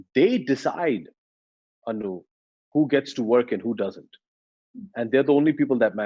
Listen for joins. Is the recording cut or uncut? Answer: uncut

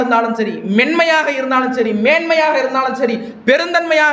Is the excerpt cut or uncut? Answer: uncut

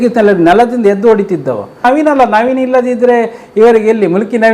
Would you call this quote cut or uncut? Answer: cut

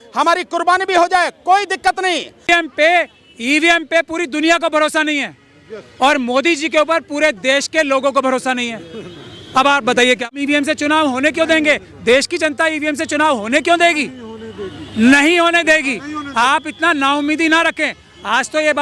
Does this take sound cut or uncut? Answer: cut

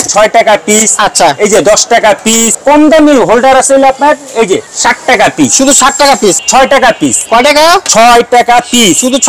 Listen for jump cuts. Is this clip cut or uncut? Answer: cut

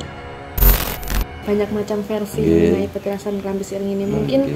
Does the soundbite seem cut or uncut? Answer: cut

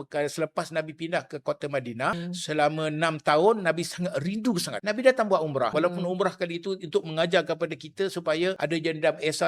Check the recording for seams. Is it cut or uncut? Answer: cut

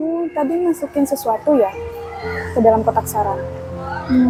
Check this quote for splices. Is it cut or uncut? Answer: uncut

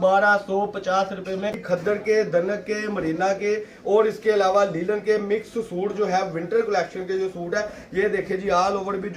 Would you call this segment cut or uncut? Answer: cut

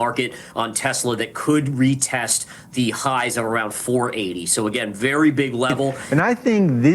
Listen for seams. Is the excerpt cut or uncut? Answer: cut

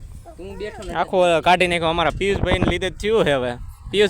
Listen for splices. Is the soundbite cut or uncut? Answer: uncut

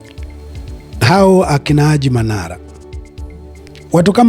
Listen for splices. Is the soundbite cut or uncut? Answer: cut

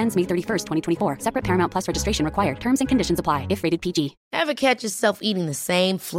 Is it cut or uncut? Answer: cut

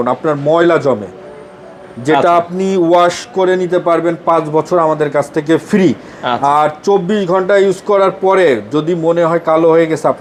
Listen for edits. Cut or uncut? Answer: uncut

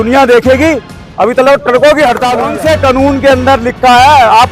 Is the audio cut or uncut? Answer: cut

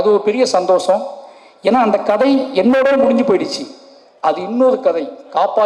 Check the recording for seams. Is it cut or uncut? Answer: uncut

